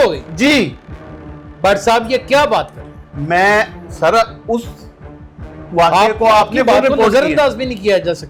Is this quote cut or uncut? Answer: uncut